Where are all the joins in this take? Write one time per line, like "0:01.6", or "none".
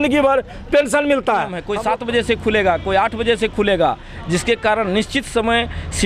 0:01.7